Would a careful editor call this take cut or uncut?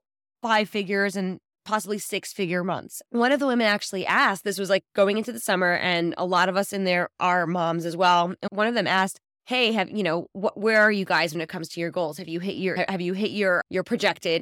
cut